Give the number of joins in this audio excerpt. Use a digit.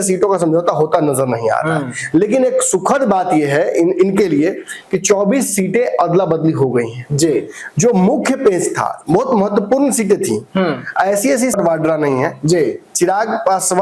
1